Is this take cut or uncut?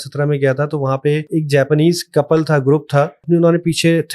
cut